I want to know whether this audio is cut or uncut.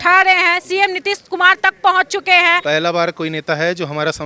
cut